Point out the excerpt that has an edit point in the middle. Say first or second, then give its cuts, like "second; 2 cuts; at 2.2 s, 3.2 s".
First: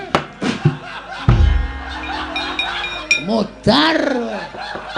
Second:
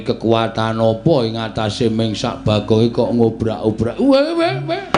first; 1 cut; at 3.0 s